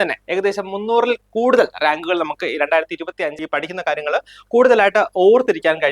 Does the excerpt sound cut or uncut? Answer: cut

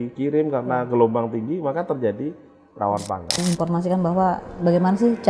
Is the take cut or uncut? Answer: cut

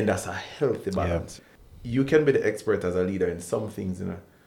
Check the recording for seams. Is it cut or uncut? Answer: cut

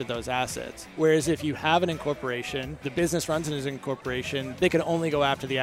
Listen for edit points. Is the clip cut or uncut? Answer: cut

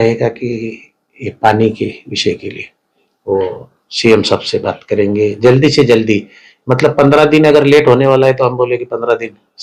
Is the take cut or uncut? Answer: uncut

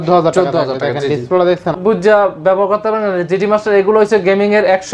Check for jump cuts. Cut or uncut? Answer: cut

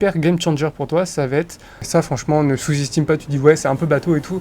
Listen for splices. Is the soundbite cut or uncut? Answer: cut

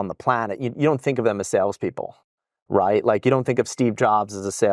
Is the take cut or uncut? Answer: uncut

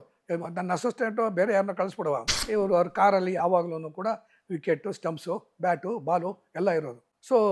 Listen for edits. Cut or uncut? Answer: cut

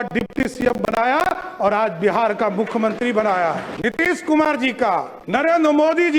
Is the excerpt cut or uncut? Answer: cut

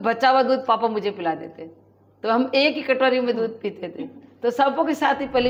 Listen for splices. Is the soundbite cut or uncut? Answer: uncut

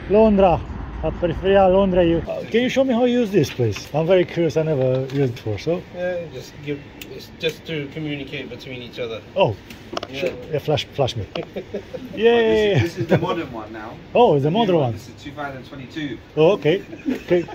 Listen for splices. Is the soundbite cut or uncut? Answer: cut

